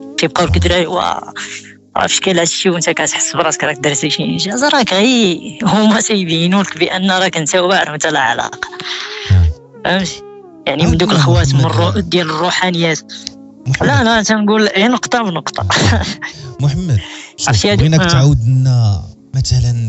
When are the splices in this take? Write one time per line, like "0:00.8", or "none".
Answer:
none